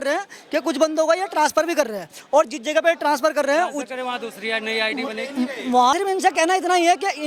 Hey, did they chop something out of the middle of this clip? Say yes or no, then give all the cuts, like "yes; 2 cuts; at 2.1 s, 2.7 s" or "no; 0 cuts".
yes; 1 cut; at 5.9 s